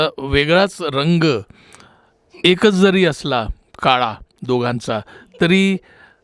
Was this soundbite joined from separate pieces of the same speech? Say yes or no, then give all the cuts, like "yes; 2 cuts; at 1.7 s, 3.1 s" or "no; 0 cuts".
no; 0 cuts